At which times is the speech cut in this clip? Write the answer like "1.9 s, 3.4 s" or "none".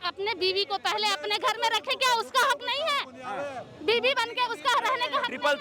none